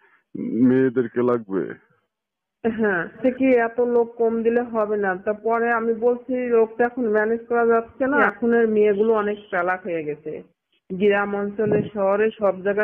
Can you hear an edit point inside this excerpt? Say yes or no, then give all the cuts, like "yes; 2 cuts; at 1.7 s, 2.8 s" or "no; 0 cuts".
yes; 2 cuts; at 3.2 s, 8.3 s